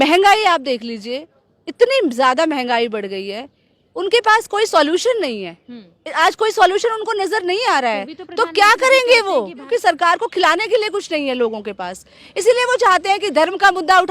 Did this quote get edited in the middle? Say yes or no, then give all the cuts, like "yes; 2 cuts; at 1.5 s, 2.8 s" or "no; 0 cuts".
yes; 1 cut; at 9.6 s